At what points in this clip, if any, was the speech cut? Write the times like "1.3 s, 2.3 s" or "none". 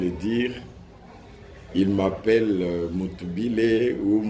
none